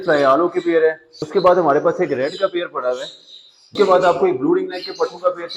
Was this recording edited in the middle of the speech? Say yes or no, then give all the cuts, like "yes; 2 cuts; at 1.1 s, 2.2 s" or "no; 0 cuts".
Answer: yes; 2 cuts; at 1.1 s, 3.7 s